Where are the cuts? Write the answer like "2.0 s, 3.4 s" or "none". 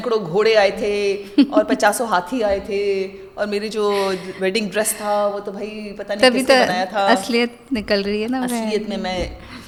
none